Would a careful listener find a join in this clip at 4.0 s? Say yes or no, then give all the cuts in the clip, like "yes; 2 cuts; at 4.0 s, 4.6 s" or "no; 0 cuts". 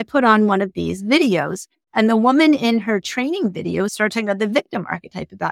yes; 1 cut; at 4.0 s